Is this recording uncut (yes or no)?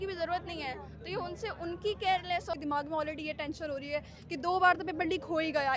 no